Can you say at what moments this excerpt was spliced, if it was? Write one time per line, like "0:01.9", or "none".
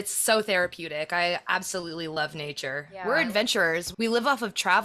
0:02.9
0:03.9

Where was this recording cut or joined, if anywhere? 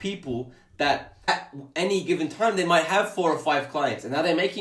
0:01.3

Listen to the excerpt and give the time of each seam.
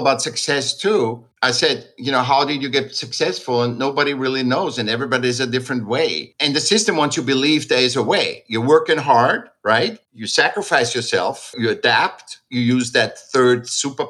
0:01.3

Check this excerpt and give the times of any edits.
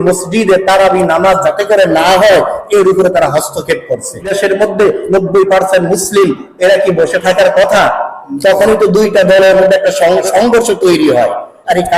0:04.3
0:10.3

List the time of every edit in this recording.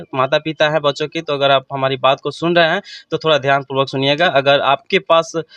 none

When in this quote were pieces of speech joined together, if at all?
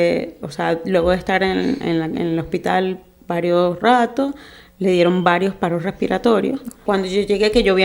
0:06.8

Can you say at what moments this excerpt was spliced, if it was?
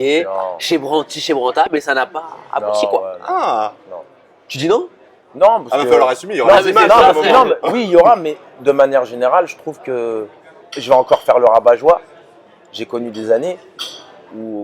none

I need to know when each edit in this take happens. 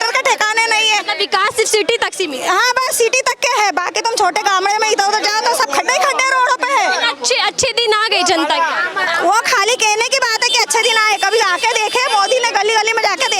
none

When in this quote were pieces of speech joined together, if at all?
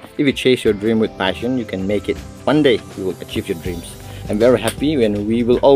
none

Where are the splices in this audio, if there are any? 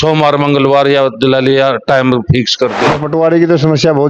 0:02.9

